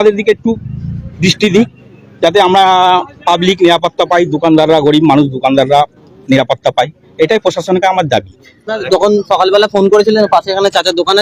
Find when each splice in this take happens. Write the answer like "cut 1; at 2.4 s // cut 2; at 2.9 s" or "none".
cut 1; at 8.7 s